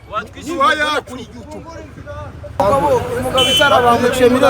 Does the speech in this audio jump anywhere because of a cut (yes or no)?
yes